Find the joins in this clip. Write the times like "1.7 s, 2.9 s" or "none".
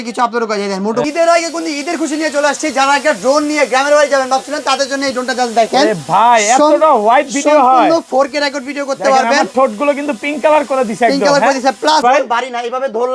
1.0 s, 12.0 s

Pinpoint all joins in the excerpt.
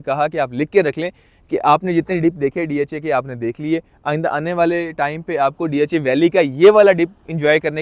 none

